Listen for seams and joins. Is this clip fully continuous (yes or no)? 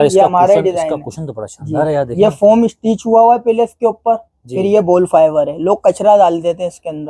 yes